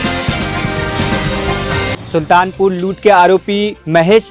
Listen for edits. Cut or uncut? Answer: cut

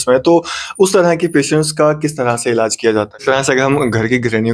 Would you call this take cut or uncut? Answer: cut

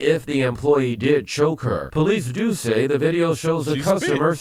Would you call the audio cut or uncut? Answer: uncut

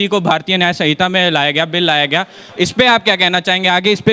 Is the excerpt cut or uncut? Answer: uncut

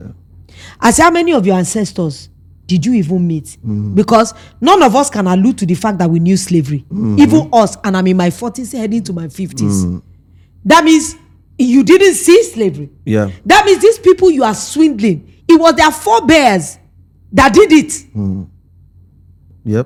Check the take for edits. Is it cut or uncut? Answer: uncut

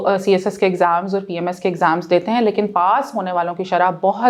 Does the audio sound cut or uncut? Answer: uncut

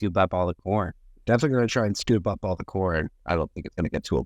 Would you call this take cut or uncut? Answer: cut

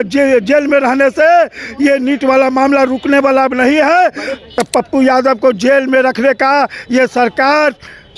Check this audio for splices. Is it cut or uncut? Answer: cut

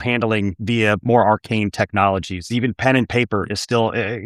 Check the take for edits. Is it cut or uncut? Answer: uncut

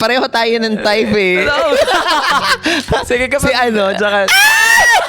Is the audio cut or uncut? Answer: cut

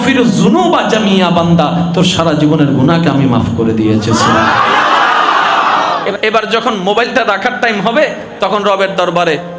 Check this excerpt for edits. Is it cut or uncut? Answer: cut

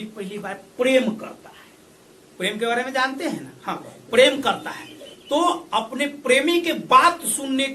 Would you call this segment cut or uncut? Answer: uncut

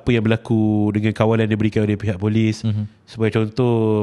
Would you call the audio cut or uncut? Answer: uncut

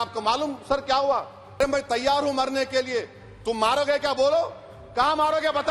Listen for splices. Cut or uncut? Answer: cut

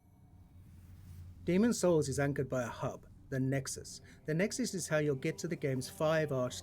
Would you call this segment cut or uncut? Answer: cut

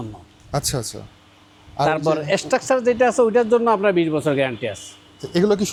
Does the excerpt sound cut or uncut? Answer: uncut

